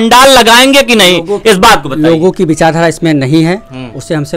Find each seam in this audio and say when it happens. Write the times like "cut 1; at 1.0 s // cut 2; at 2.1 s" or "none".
none